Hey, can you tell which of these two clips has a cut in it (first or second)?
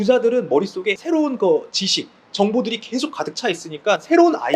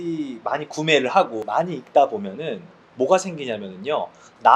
first